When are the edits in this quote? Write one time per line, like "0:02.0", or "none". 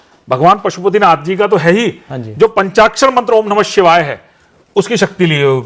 none

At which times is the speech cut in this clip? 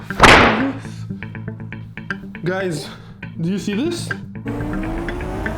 0:04.4

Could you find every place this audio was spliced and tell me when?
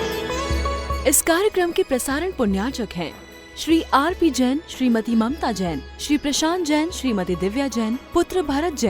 0:01.0

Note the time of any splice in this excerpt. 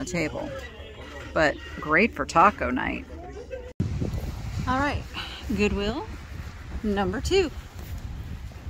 0:03.7

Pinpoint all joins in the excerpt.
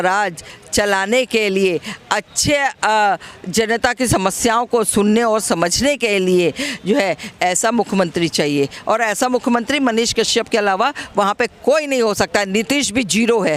none

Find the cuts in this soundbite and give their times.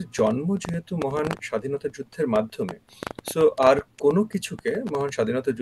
none

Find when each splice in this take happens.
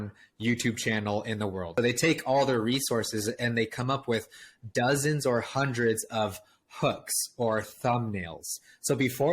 0:01.7

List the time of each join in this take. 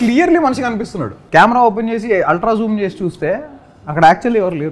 0:01.2

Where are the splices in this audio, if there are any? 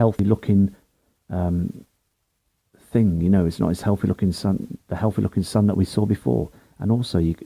0:05.9

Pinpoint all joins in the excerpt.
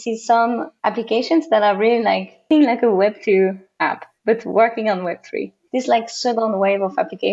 0:02.5
0:05.6

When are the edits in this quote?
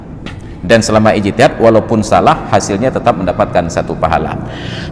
none

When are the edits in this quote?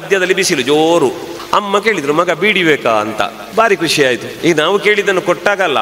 0:01.3
0:03.4
0:04.3

